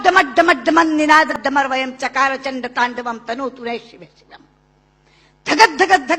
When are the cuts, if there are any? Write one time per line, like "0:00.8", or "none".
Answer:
0:01.3